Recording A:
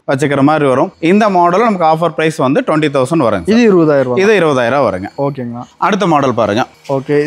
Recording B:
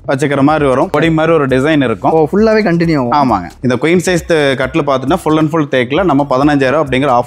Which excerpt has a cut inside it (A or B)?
B